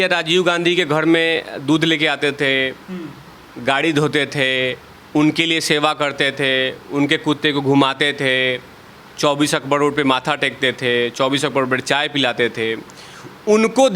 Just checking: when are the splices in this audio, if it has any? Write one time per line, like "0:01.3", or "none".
none